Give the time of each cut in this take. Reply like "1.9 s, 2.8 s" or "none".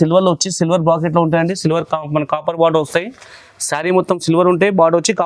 none